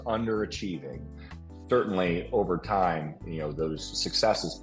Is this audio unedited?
yes; 0 cuts

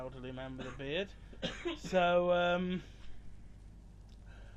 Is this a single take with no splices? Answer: no; 1 cut; at 3.7 s

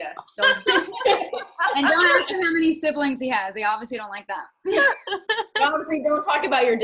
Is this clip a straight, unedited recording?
yes; 0 cuts

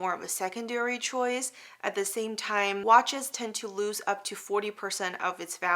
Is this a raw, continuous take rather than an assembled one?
yes; 0 cuts

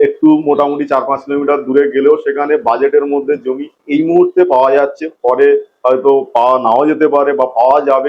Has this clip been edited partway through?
no; 0 cuts

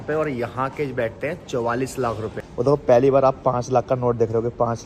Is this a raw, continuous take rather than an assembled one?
no; 1 cut; at 2.4 s

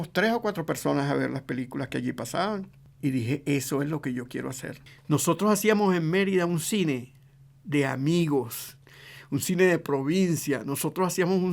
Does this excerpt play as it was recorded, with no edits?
no; 1 cut; at 4.7 s

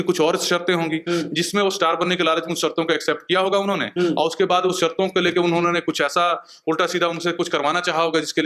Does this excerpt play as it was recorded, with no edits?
yes; 0 cuts

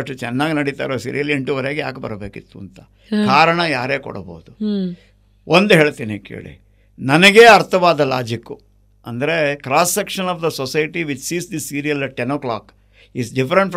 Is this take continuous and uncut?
yes; 0 cuts

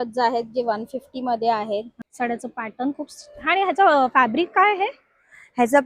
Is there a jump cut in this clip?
yes; 1 cut; at 2.0 s

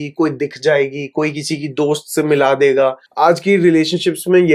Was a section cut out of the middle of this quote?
yes; 1 cut; at 3.0 s

